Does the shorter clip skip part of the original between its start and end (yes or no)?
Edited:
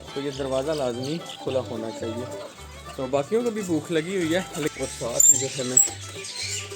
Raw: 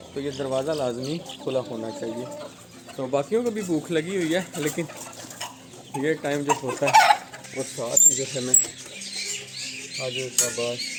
yes